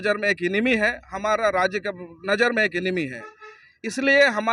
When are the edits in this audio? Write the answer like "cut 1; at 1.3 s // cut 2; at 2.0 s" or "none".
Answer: none